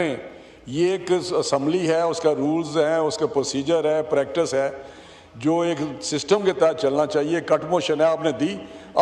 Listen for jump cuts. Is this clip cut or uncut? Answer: uncut